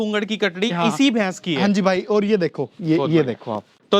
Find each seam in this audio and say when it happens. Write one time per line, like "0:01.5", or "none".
none